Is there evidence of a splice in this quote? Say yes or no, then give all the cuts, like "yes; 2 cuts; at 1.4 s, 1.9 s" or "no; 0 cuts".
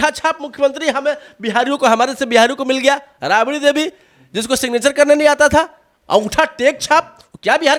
no; 0 cuts